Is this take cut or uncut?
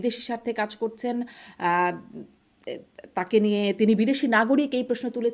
uncut